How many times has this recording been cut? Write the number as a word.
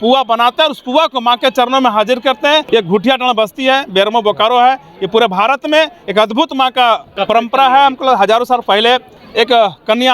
three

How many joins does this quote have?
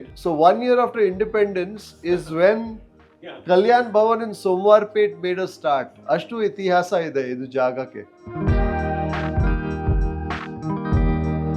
one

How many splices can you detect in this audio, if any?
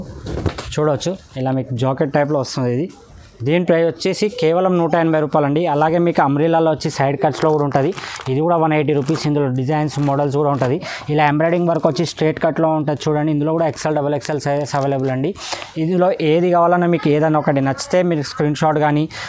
zero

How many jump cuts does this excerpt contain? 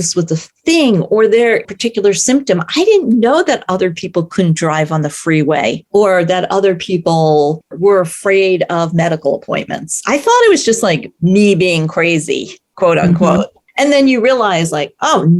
four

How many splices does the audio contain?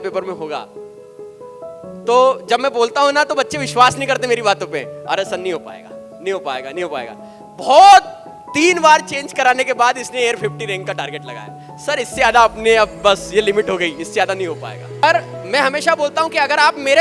one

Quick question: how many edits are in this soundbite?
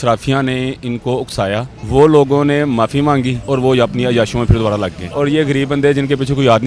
three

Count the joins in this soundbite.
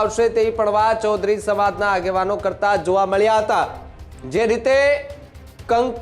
zero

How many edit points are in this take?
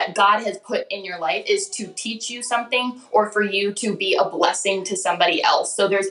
zero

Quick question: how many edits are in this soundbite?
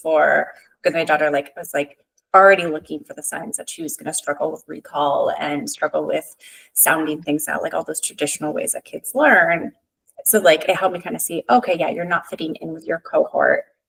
zero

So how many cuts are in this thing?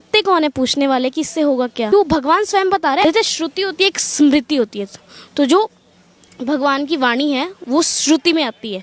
two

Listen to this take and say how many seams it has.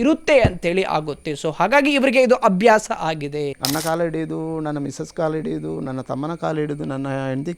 one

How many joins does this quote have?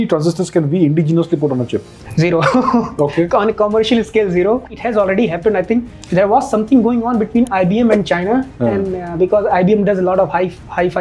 two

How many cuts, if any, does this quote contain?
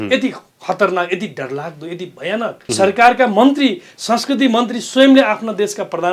one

